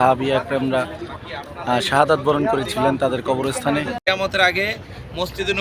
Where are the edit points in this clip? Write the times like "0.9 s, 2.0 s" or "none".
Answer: 4.0 s